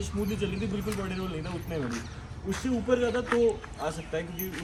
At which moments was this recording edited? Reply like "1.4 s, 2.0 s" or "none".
none